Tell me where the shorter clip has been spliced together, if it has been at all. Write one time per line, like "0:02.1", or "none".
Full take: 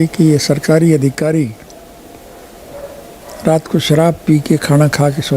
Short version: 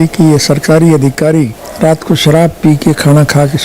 0:01.6